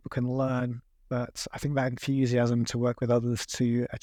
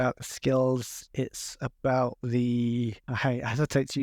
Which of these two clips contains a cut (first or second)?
second